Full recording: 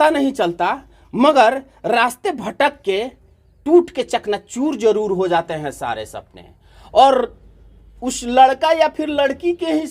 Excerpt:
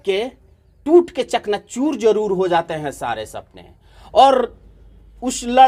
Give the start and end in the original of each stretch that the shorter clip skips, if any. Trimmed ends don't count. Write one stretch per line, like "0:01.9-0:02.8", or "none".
none